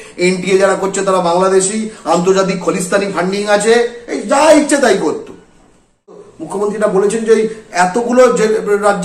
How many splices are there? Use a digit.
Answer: 1